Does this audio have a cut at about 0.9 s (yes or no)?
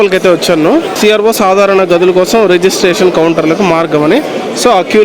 yes